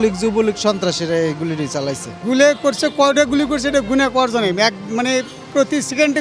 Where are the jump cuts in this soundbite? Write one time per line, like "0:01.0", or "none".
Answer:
none